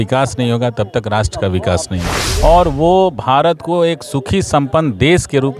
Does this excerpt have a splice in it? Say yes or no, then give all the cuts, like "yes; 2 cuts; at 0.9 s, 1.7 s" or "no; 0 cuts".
yes; 1 cut; at 2.1 s